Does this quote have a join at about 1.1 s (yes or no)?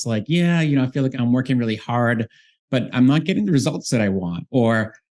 yes